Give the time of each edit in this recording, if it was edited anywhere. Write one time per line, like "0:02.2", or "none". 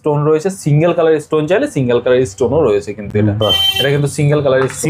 none